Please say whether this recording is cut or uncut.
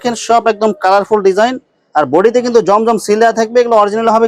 uncut